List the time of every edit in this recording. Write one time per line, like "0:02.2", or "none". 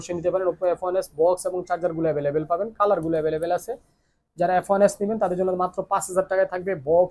none